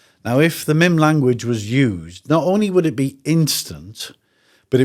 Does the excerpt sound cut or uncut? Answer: uncut